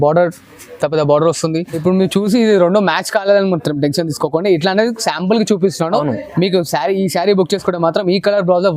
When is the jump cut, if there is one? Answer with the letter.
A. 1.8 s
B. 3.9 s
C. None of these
A